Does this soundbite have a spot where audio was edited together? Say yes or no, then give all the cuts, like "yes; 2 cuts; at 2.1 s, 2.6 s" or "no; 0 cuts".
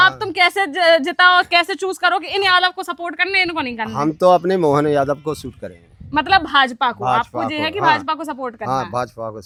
no; 0 cuts